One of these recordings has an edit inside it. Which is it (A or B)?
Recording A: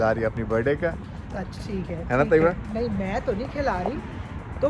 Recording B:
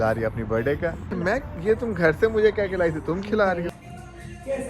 B